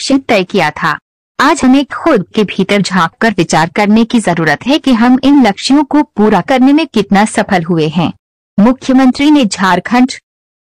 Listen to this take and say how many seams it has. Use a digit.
0